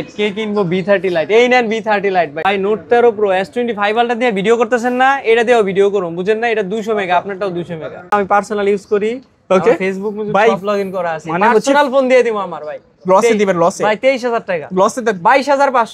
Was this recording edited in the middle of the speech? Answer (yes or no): yes